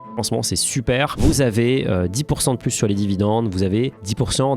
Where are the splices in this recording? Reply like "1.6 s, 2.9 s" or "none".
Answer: 1.2 s